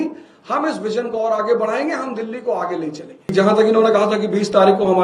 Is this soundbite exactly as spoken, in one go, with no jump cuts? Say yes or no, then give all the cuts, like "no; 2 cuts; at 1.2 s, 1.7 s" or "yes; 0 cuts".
no; 1 cut; at 3.3 s